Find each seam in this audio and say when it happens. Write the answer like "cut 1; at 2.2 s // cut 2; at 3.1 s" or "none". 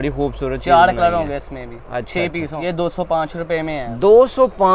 cut 1; at 2.6 s